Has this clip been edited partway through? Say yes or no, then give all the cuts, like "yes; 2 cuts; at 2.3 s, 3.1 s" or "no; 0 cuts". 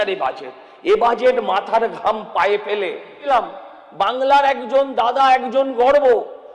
yes; 1 cut; at 3.3 s